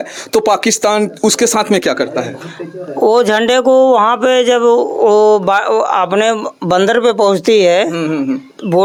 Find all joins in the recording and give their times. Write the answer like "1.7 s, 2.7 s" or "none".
none

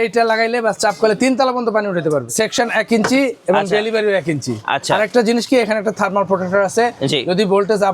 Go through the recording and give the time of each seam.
2.3 s

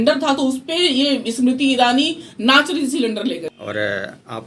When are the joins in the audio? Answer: 3.5 s

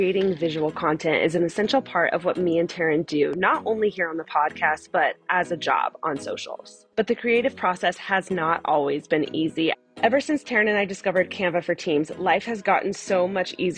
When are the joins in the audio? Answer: 9.8 s

